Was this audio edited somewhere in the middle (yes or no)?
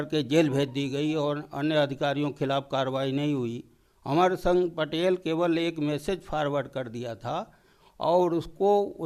no